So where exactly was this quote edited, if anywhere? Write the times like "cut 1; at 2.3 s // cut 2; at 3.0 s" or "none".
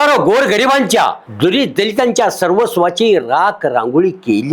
cut 1; at 1.2 s